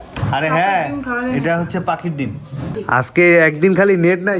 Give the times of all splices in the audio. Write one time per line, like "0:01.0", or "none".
0:02.7